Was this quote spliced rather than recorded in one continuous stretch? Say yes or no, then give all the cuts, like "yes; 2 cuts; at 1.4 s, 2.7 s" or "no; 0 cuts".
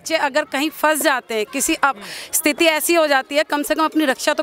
no; 0 cuts